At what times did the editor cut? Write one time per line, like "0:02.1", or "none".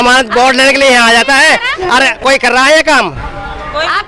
none